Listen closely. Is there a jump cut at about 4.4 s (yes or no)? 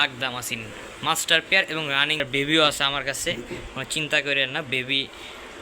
no